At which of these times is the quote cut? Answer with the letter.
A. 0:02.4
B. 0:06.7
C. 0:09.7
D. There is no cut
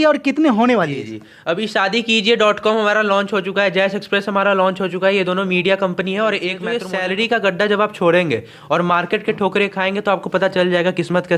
B